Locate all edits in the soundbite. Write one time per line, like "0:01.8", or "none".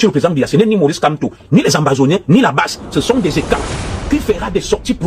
0:04.1